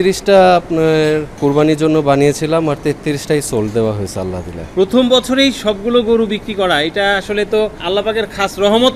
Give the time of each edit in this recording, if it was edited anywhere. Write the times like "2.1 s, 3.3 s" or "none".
1.4 s, 4.7 s